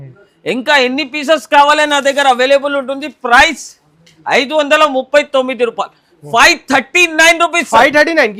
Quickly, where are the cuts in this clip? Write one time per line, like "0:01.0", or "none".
none